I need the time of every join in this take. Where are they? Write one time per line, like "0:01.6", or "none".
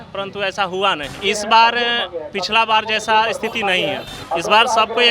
0:01.2
0:04.1